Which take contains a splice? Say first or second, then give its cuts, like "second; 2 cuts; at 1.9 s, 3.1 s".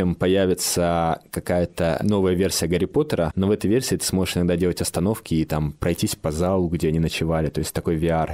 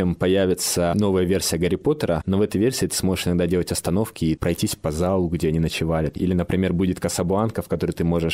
second; 3 cuts; at 0.9 s, 4.4 s, 6.1 s